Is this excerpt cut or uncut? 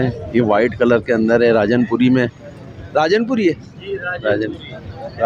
uncut